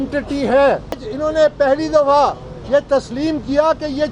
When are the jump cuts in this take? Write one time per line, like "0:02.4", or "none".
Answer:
0:01.1

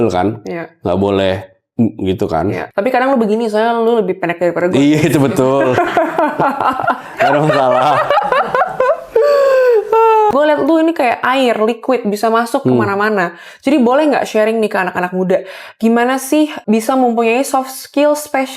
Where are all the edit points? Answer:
0:02.6
0:10.3
0:16.6

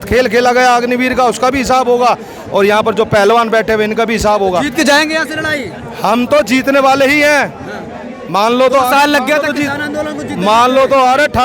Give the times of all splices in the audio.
none

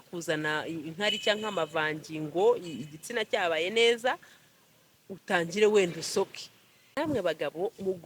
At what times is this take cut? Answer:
0:06.8

